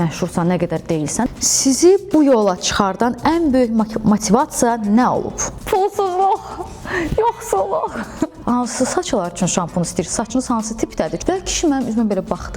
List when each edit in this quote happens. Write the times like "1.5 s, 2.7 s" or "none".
1.3 s, 8.4 s, 11.2 s